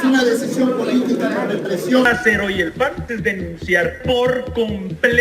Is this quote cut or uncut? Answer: cut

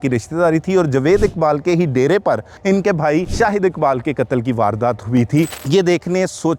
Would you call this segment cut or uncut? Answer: cut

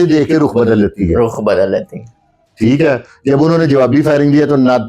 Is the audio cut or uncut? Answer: uncut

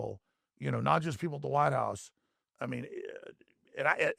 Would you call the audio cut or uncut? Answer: uncut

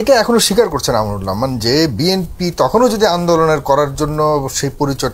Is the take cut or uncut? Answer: uncut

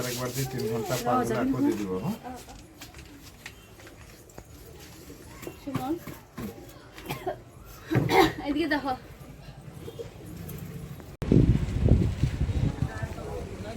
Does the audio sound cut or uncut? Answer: uncut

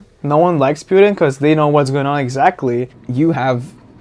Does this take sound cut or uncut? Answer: cut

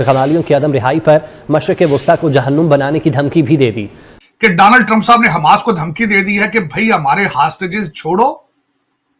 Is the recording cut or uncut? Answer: cut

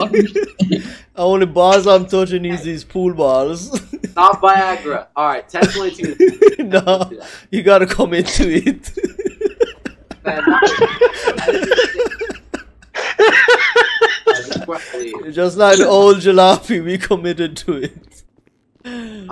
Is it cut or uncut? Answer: uncut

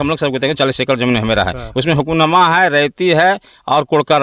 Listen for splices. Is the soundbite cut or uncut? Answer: uncut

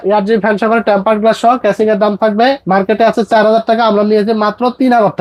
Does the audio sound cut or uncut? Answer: uncut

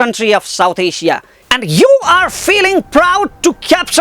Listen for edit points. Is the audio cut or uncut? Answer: cut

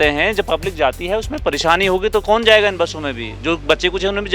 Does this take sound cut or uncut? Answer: uncut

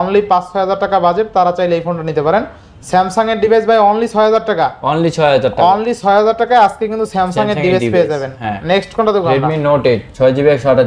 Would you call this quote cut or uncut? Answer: uncut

